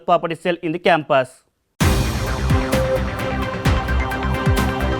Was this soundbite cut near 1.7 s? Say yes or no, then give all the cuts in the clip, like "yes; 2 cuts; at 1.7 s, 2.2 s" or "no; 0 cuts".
yes; 1 cut; at 1.7 s